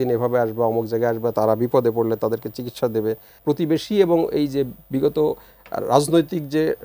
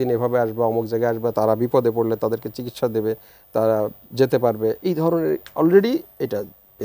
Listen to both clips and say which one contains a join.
first; 1 cut; at 3.3 s

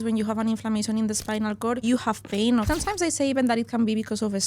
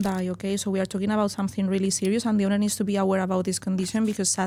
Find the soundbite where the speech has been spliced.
first; 2 cuts; at 1.8 s, 2.7 s

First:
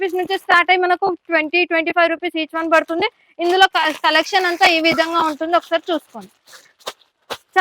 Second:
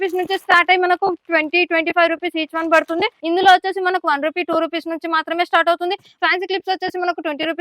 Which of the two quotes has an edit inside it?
second; 2 cuts; at 3.2 s, 6.1 s

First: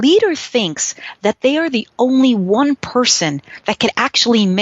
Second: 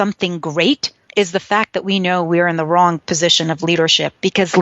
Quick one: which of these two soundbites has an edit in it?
second; 1 cut; at 1.0 s

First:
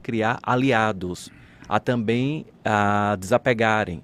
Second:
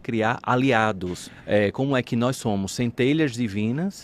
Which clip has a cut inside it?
second; 1 cut; at 1.3 s

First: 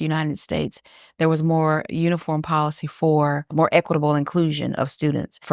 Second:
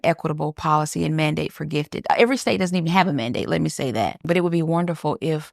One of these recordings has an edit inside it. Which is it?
second; 1 cut; at 4.2 s

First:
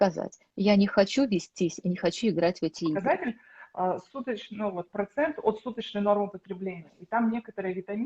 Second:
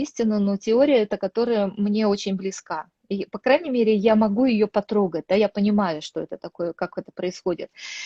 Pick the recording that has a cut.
first; 1 cut; at 3.0 s

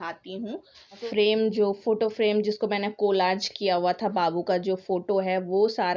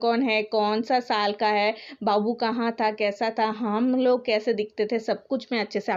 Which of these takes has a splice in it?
first; 1 cut; at 1.0 s

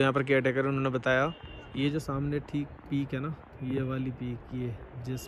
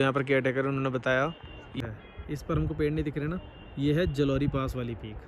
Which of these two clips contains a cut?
second; 1 cut; at 1.8 s

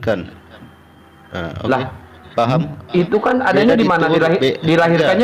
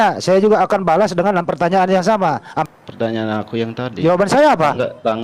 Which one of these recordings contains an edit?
second; 1 cut; at 2.6 s

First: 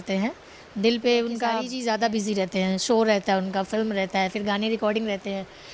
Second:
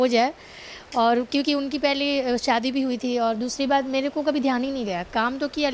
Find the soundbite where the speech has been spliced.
first; 1 cut; at 1.7 s

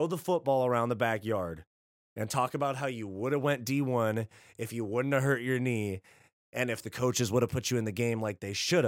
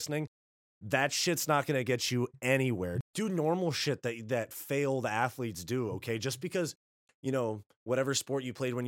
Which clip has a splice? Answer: second; 1 cut; at 3.0 s

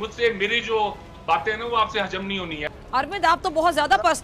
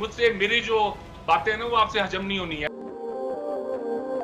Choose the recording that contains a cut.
first; 1 cut; at 2.7 s

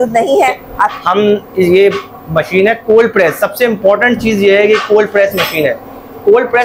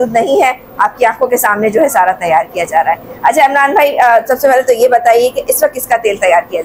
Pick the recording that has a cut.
first; 1 cut; at 0.9 s

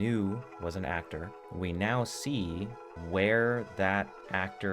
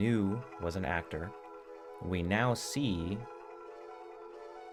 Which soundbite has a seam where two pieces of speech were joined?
first; 2 cuts; at 1.4 s, 2.9 s

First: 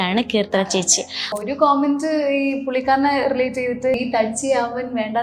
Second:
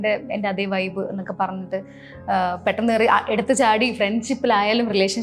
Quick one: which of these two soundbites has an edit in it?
first; 2 cuts; at 1.4 s, 4.0 s

